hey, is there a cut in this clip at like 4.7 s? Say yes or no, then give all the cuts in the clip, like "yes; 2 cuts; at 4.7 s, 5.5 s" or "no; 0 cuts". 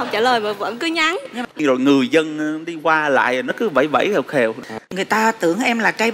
yes; 2 cuts; at 1.4 s, 4.7 s